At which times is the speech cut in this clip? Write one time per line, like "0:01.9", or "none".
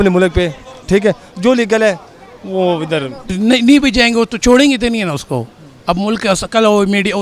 0:03.2